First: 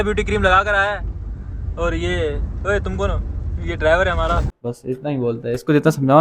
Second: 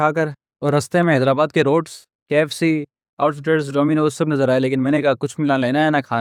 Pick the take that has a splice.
first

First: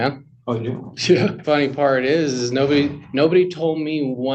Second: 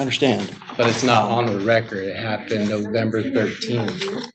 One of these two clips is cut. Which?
first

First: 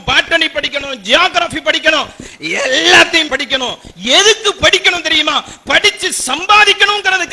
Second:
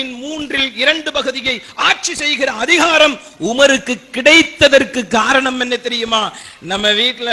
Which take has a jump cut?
first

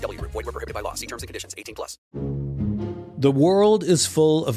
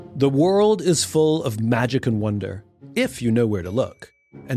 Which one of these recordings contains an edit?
first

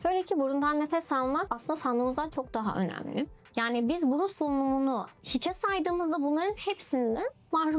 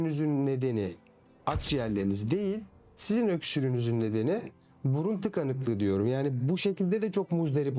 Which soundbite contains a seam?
first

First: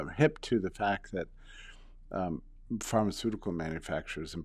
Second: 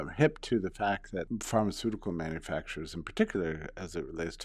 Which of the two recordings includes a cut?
second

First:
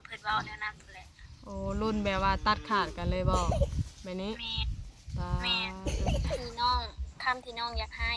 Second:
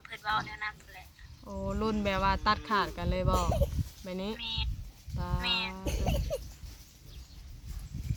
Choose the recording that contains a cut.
first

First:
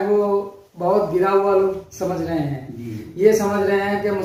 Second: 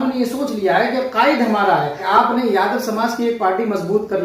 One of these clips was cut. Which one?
second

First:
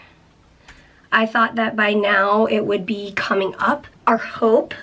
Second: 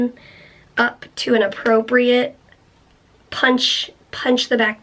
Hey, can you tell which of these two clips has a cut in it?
first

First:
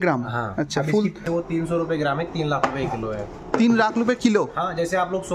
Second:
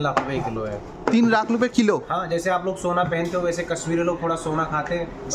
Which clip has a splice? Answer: first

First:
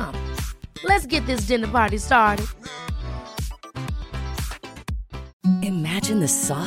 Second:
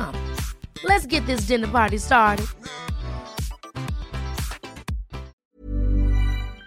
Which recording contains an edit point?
second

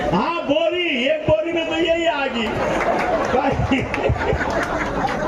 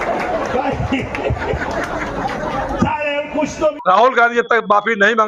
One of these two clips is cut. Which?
second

